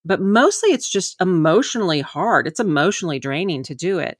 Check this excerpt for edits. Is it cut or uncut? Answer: cut